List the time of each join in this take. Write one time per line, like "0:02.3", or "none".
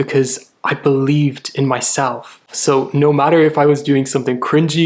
none